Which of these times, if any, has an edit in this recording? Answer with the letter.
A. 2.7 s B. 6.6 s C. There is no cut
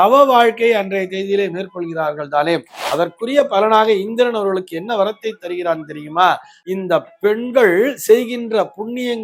B